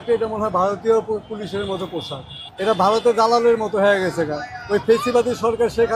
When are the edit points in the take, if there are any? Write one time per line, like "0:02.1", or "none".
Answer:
none